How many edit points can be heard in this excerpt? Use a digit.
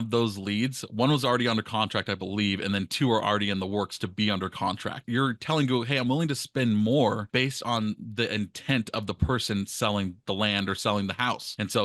2